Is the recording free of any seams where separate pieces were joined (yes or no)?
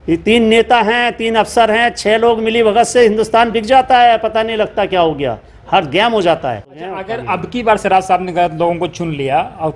no